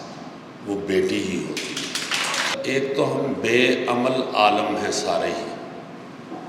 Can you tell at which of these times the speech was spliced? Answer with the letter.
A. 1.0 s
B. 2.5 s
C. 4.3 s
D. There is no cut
B